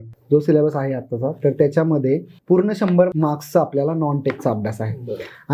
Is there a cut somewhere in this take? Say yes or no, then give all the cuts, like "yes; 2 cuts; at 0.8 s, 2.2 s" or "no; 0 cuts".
yes; 2 cuts; at 2.3 s, 3.1 s